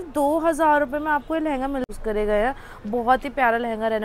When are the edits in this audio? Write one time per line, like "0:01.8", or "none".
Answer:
0:01.9